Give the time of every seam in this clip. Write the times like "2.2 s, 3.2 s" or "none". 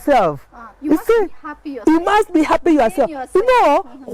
none